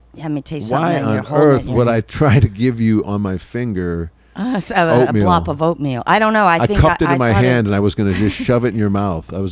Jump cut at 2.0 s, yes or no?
no